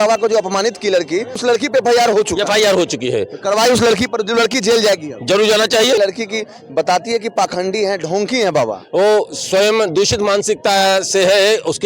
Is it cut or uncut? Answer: cut